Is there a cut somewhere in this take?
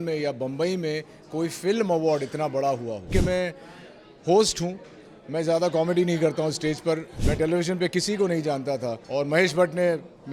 yes; 3 cuts; at 3.1 s, 7.1 s, 9.0 s

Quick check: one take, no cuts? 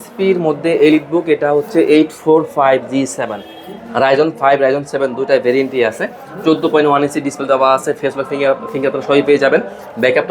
yes; 0 cuts

